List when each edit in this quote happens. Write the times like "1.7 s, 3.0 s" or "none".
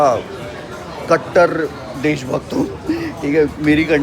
none